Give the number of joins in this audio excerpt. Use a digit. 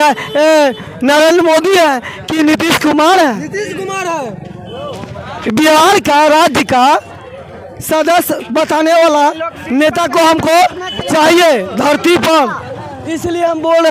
0